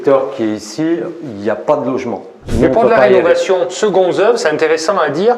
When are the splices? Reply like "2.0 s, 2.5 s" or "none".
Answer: 2.5 s